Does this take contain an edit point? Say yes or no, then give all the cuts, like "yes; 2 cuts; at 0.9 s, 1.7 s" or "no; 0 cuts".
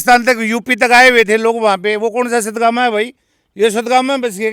no; 0 cuts